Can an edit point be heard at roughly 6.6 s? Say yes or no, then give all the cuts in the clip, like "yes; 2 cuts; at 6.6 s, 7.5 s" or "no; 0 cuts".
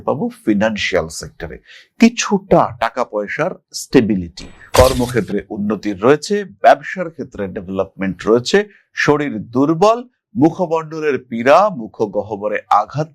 no; 1 cut; at 4.6 s